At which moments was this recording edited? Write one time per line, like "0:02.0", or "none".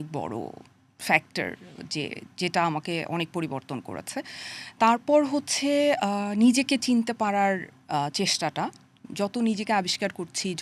none

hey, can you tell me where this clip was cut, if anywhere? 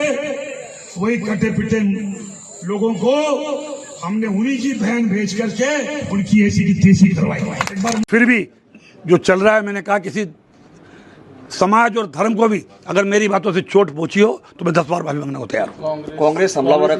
0:08.0

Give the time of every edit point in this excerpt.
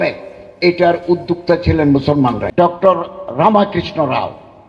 0:02.4

